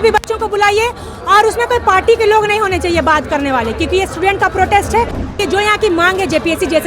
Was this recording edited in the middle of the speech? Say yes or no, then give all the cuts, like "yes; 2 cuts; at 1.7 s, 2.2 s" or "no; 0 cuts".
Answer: yes; 1 cut; at 5.3 s